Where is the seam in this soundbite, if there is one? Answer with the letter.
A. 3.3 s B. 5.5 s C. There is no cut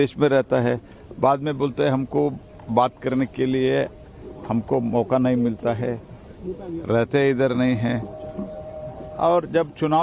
B